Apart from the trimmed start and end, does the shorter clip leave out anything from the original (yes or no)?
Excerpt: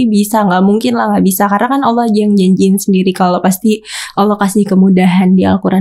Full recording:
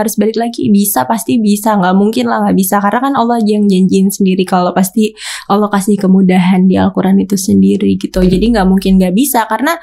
no